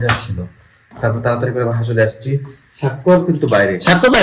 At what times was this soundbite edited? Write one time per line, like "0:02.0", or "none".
none